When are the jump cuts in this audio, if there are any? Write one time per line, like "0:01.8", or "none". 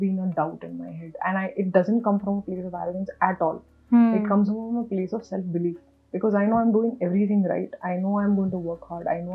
none